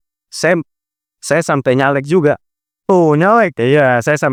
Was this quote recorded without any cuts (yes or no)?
yes